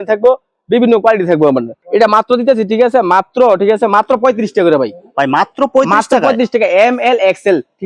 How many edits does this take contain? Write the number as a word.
zero